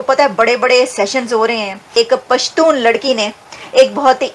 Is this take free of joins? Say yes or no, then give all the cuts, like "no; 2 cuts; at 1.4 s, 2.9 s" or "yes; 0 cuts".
no; 1 cut; at 1.7 s